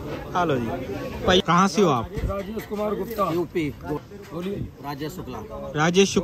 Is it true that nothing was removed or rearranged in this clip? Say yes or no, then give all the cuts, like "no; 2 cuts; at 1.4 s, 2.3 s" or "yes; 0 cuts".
no; 2 cuts; at 1.4 s, 4.0 s